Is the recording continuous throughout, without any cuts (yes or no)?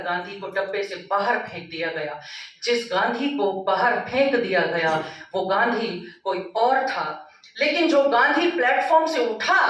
yes